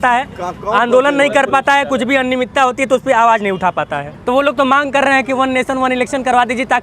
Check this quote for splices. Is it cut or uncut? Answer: cut